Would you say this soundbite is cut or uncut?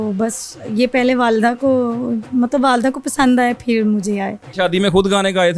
cut